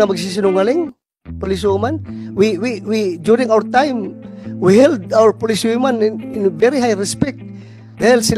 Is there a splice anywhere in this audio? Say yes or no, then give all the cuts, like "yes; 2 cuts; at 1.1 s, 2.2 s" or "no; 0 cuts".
no; 0 cuts